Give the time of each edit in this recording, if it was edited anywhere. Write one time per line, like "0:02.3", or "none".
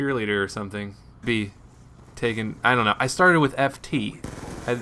none